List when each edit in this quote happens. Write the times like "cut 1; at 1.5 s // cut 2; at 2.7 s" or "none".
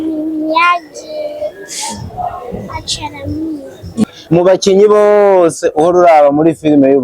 cut 1; at 4.0 s